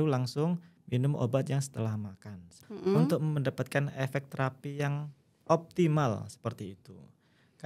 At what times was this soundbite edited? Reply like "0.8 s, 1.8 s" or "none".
2.7 s